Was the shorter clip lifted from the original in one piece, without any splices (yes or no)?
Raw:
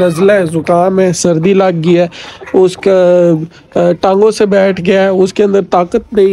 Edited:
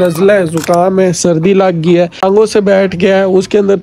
no